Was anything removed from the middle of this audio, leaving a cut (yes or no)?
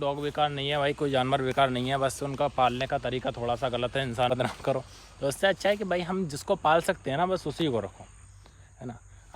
yes